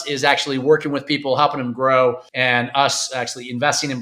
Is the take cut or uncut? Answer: cut